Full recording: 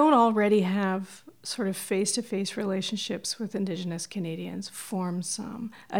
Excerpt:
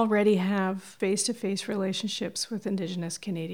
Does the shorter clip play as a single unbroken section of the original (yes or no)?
no